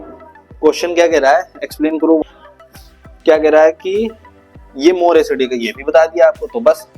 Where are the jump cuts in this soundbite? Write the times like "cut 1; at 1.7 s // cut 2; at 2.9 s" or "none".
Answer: cut 1; at 2.2 s